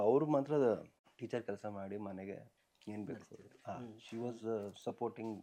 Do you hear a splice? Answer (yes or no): no